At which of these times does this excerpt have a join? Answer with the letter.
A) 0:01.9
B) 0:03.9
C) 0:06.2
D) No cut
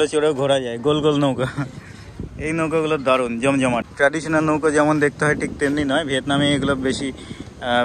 B